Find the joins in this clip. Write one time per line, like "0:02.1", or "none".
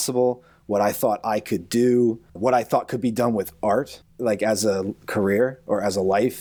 0:02.3
0:04.2

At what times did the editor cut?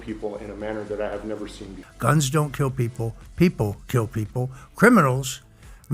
none

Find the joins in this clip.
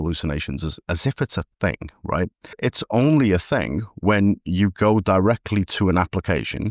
0:02.6

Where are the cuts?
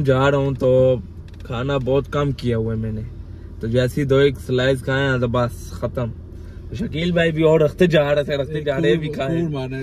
none

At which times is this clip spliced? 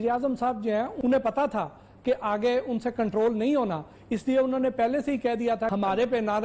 0:00.9
0:05.7

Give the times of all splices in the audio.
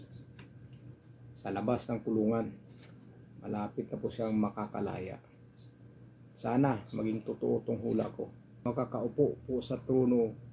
0:08.6

